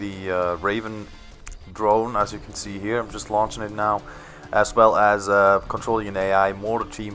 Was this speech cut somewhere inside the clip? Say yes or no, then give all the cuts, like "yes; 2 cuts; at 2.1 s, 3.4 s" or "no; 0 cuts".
no; 0 cuts